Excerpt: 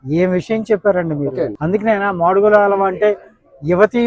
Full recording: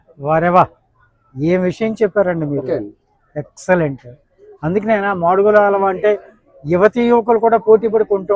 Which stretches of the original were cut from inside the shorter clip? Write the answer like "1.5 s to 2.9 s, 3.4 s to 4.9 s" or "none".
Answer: 2.9 s to 4.6 s